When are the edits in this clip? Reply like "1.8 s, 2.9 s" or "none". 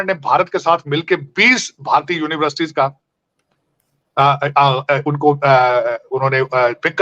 none